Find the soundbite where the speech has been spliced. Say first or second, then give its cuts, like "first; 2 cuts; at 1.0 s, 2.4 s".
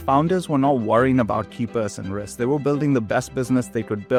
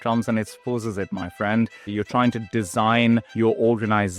second; 2 cuts; at 1.9 s, 3.3 s